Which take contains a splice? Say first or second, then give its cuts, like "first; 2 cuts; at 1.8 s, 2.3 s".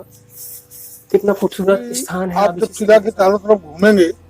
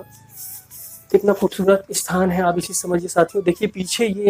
first; 1 cut; at 2.2 s